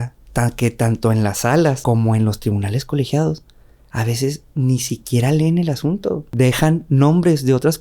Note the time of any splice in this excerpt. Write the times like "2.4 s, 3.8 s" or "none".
1.8 s, 6.2 s